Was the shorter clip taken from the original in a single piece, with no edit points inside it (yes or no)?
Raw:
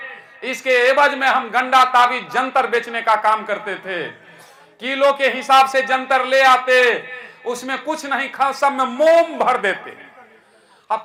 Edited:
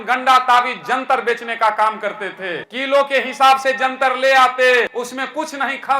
no